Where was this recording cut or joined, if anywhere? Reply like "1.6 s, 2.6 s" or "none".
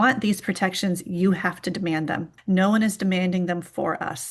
2.3 s